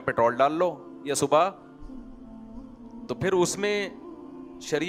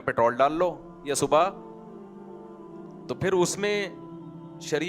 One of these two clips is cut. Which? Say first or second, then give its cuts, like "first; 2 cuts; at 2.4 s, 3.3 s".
second; 2 cuts; at 1.5 s, 3.1 s